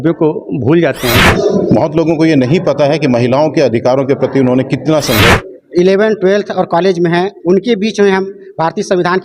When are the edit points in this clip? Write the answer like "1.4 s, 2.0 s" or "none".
1.3 s, 5.4 s